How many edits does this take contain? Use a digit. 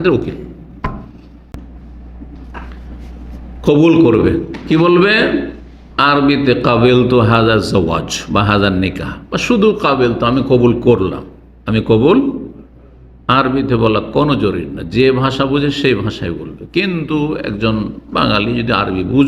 1